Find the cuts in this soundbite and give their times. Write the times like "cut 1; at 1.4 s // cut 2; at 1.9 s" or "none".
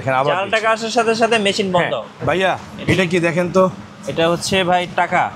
cut 1; at 2.1 s